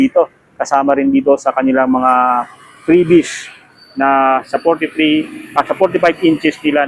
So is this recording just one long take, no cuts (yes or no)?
yes